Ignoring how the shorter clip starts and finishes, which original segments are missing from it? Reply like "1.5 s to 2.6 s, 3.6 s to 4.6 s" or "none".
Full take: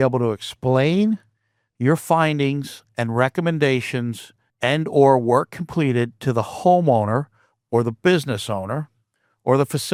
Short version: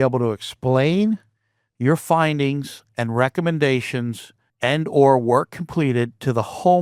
none